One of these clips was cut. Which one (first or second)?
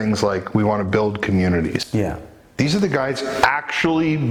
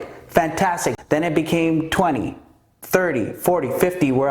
second